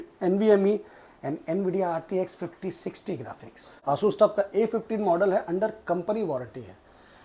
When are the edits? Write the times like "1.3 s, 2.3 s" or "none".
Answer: 3.8 s